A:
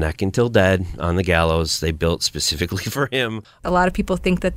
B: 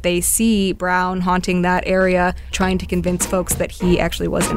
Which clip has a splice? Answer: A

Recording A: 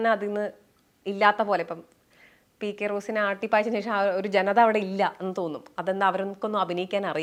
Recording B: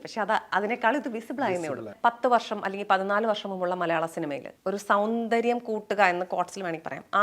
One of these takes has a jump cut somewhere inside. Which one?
B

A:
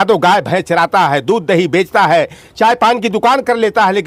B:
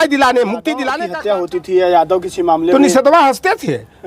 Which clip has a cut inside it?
B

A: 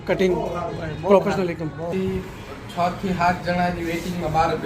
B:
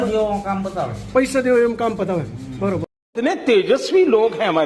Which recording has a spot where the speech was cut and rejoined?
A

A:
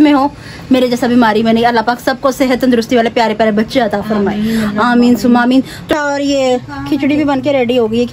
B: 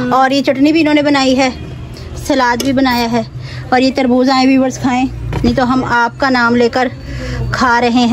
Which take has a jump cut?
A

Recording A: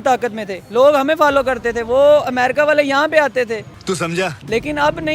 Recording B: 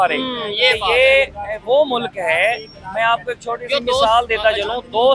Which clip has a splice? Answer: A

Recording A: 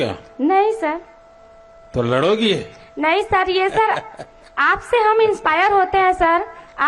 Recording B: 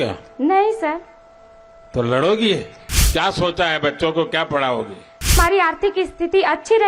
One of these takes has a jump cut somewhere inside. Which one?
B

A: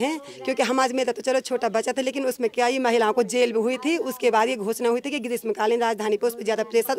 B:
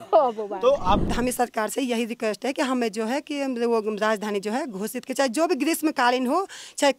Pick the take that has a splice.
B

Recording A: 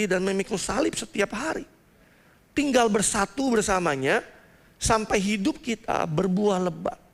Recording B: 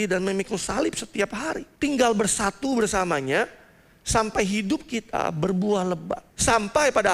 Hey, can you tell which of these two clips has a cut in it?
B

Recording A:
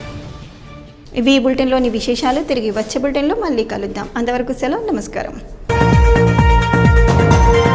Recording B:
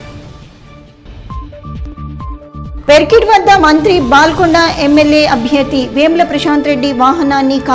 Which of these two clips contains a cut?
B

